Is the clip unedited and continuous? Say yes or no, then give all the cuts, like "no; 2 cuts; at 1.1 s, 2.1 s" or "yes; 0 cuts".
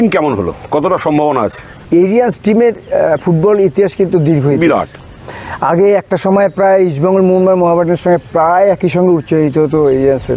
yes; 0 cuts